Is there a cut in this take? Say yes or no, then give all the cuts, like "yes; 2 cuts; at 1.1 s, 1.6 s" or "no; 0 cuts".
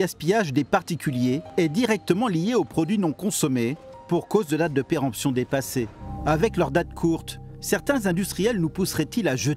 yes; 3 cuts; at 1.5 s, 3.9 s, 6.0 s